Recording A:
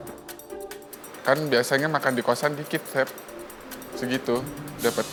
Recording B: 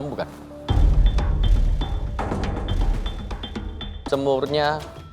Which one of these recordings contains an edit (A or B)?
B